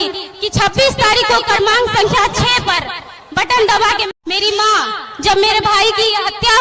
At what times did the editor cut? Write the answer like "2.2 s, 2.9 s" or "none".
4.0 s